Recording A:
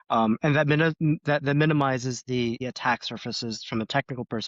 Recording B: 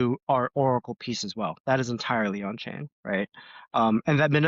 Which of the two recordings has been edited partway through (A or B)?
A